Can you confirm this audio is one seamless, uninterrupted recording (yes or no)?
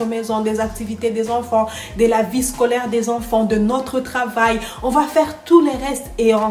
yes